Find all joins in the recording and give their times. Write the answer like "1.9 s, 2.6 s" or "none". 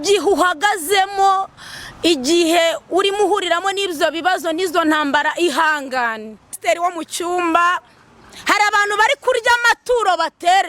6.6 s